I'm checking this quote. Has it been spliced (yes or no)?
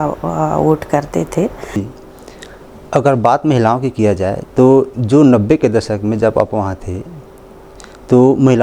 yes